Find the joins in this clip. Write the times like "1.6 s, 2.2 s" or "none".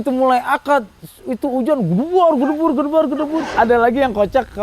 3.5 s